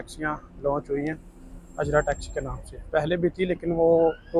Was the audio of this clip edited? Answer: no; 0 cuts

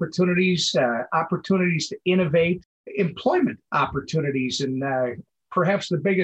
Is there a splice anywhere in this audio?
no; 0 cuts

